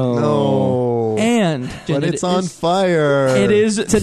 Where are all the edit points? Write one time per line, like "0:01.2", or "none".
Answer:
0:01.8